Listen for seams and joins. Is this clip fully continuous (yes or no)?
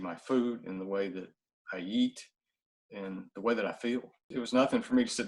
yes